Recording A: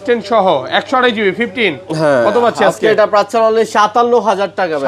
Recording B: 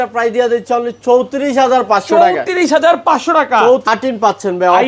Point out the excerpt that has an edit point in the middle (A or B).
B